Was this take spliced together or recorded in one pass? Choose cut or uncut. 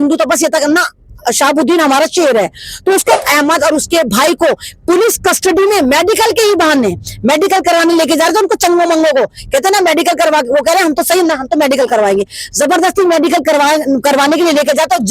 cut